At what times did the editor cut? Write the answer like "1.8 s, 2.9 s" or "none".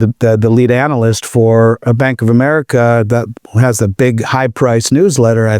none